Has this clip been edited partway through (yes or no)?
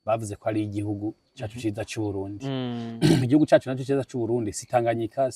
no